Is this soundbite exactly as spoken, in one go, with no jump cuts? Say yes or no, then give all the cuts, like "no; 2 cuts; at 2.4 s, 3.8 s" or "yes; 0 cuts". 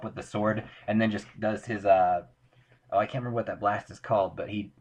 yes; 0 cuts